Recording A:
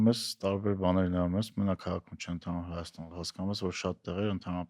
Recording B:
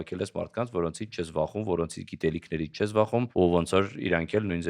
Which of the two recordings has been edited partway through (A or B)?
B